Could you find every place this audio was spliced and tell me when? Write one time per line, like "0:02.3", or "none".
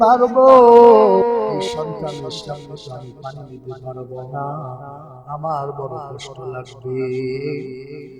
0:01.7